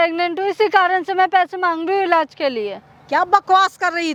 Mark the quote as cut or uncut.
uncut